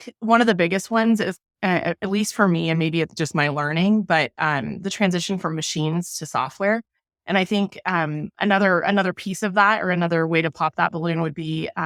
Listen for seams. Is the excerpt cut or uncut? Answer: uncut